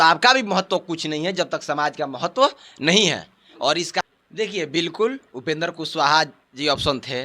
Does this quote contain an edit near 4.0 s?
yes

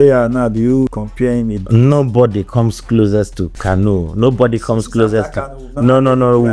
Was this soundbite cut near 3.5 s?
yes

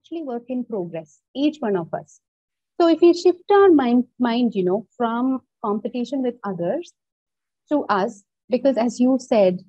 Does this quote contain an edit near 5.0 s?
no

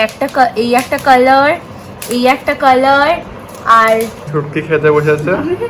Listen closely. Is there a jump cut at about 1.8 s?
no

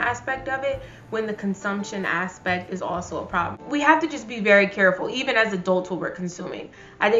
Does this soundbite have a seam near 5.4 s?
no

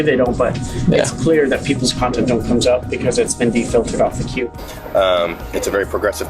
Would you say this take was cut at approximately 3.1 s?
no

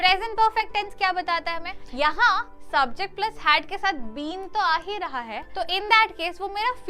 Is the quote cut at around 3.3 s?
no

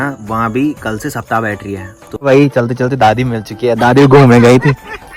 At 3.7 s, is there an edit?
no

